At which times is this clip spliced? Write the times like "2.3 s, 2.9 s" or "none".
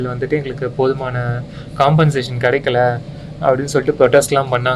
none

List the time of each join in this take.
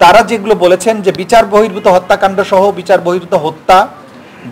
none

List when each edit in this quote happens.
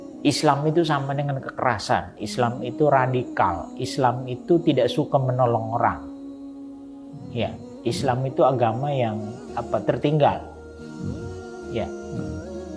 none

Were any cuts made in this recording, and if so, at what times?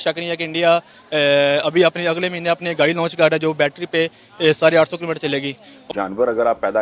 5.8 s

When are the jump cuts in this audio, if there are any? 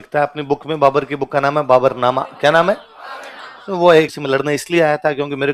4.1 s

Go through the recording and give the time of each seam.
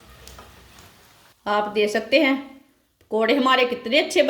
1.2 s

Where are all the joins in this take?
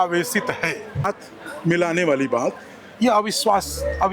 1.1 s

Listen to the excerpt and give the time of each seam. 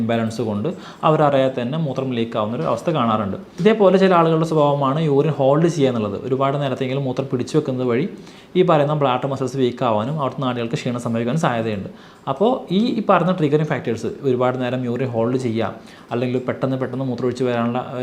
3.5 s

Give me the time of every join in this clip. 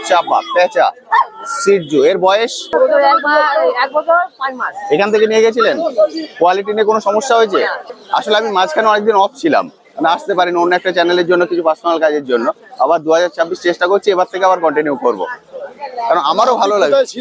2.7 s, 7.9 s

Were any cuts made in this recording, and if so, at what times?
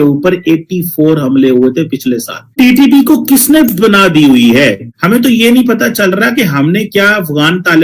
2.5 s

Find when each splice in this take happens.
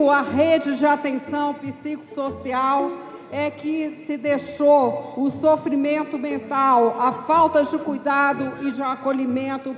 none

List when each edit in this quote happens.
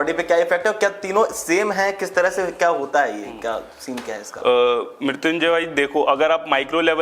none

